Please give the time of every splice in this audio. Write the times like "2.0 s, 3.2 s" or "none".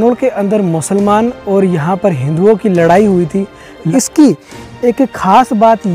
3.9 s